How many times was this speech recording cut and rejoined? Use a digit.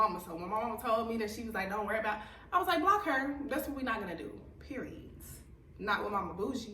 0